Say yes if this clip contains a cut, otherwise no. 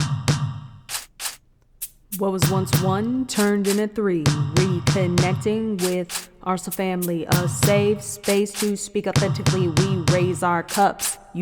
no